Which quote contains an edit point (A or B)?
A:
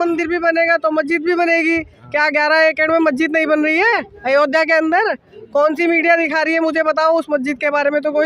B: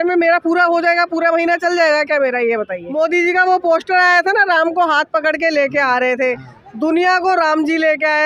B